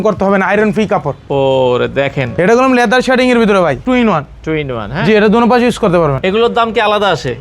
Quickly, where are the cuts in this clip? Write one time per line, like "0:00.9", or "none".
0:02.3
0:03.8
0:06.2